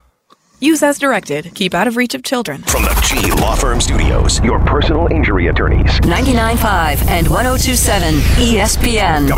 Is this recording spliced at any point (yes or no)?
yes